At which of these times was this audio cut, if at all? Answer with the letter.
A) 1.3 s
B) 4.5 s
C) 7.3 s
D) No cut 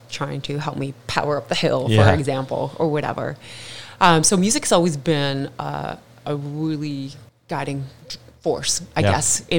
C